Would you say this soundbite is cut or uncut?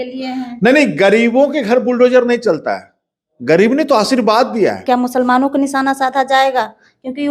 cut